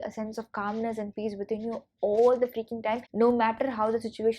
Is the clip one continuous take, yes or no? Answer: no